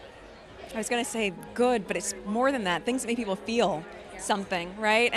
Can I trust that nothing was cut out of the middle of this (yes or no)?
yes